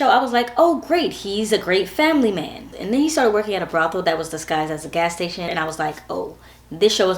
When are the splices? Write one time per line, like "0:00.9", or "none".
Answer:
0:02.6
0:05.5